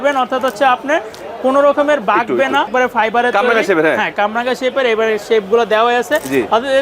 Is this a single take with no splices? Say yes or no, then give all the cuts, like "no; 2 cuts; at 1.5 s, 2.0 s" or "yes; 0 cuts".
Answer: no; 1 cut; at 2.7 s